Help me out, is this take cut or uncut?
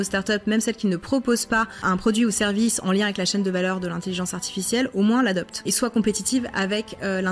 cut